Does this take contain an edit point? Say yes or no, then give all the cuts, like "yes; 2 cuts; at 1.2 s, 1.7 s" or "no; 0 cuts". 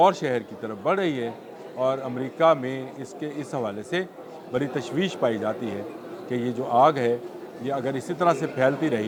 no; 0 cuts